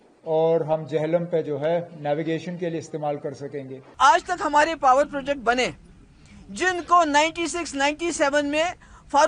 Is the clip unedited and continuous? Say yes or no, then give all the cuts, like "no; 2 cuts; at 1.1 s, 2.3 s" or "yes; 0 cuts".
no; 1 cut; at 4.0 s